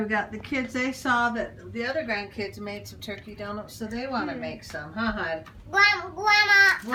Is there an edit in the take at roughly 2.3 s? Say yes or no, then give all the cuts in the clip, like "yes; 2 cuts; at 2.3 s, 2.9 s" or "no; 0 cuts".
no; 0 cuts